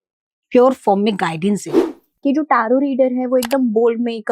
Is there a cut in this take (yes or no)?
yes